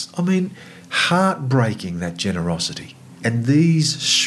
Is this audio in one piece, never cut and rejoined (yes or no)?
no